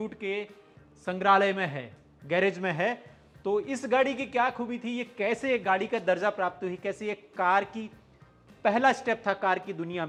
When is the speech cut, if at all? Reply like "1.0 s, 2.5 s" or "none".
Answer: none